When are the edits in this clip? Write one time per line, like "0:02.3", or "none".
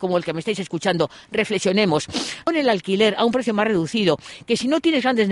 0:02.5